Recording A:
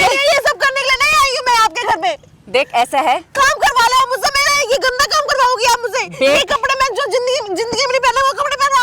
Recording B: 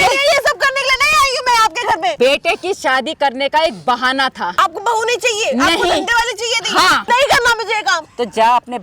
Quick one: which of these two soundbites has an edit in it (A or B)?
B